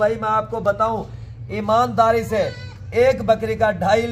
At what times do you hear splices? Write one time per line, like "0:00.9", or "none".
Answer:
none